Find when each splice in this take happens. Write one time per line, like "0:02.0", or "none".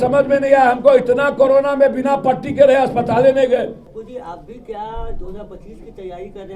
0:03.9